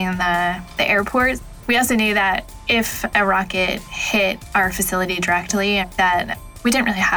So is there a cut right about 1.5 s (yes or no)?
yes